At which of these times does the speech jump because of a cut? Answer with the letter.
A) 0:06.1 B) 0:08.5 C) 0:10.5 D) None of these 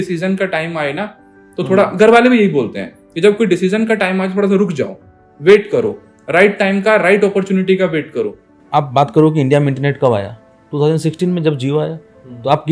B